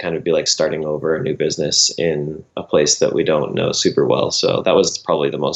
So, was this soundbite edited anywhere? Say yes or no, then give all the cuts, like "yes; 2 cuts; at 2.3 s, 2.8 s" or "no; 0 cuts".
no; 0 cuts